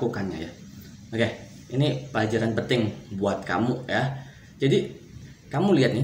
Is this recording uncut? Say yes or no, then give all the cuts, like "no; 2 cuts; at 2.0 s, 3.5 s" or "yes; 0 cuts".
yes; 0 cuts